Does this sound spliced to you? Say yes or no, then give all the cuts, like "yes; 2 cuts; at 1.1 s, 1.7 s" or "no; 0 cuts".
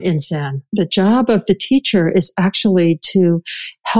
no; 0 cuts